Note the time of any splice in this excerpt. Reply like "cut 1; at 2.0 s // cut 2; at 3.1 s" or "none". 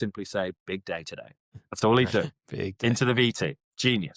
none